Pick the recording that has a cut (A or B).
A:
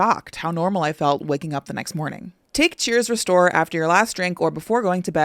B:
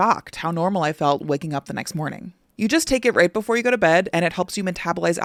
A